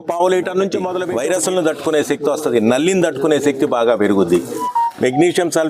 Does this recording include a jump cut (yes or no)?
yes